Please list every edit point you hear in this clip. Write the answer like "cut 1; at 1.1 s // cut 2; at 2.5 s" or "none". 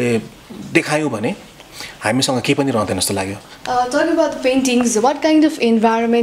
cut 1; at 3.5 s